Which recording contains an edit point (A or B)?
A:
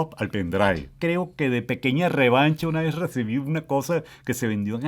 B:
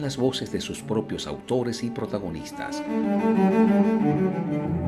A